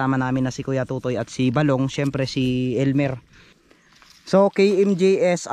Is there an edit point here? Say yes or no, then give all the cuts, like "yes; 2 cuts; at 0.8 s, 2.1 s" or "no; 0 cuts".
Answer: yes; 1 cut; at 3.8 s